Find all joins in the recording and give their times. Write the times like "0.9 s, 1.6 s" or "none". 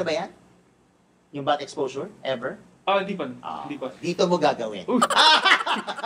none